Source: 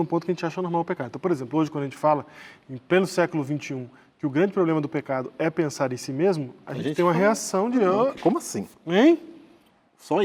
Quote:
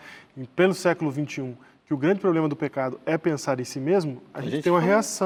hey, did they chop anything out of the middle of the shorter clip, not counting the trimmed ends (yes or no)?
no